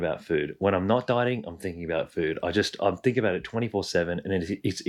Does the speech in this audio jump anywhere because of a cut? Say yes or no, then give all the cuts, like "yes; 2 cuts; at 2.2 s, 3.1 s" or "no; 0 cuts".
no; 0 cuts